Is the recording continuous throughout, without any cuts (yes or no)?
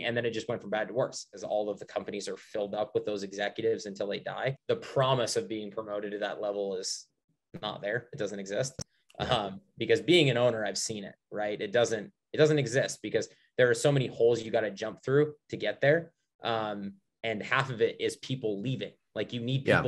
no